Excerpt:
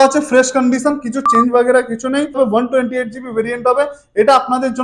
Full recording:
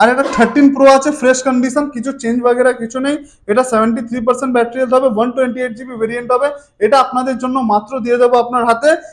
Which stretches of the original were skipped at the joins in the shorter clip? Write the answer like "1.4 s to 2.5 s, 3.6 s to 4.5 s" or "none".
3.3 s to 5.0 s

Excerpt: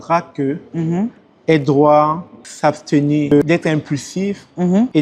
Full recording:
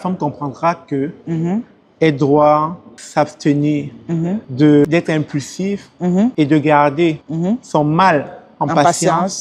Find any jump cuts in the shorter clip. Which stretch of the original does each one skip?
3.8 s to 4.7 s

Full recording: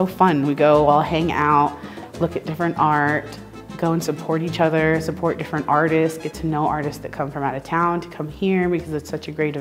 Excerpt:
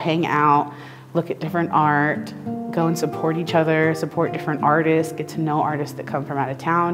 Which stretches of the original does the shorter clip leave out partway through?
none

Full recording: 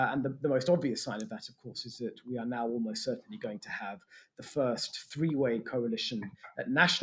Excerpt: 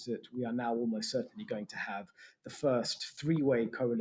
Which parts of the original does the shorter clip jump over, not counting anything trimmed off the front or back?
none

